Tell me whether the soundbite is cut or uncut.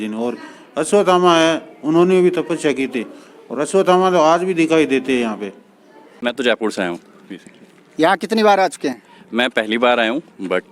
cut